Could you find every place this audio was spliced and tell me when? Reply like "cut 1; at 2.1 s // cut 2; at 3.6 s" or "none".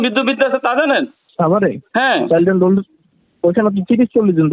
cut 1; at 1.2 s